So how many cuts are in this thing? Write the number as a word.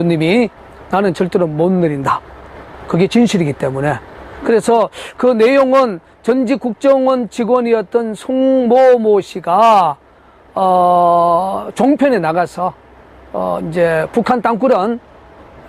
one